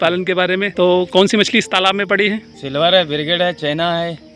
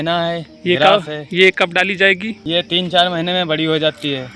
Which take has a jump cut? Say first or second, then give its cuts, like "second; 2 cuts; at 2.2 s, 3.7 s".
first; 2 cuts; at 0.9 s, 2.5 s